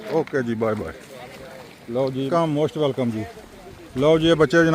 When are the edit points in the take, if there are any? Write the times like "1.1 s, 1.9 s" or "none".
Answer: 2.3 s

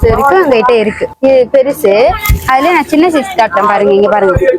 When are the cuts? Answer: none

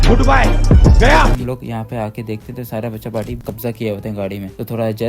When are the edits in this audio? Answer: 1.4 s

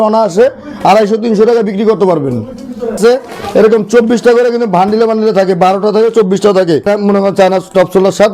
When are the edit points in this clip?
2.9 s, 6.9 s

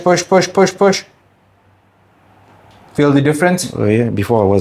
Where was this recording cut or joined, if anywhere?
none

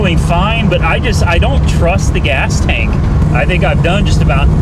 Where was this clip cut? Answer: 3.2 s

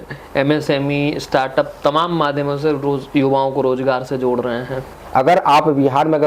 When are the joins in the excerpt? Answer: 4.9 s

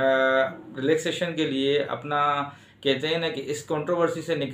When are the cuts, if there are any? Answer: none

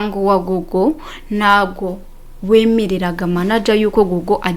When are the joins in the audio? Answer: none

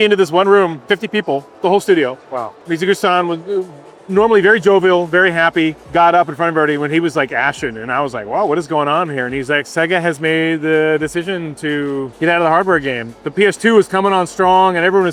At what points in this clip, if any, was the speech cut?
none

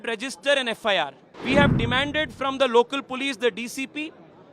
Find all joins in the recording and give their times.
1.3 s

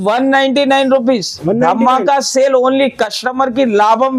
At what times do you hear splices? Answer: none

